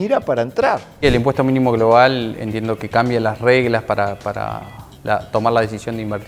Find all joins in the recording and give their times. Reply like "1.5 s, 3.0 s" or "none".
1.0 s